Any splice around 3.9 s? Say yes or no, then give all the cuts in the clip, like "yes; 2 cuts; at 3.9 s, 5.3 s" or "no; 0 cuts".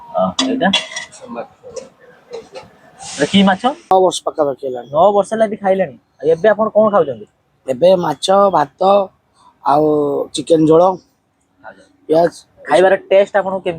yes; 1 cut; at 3.9 s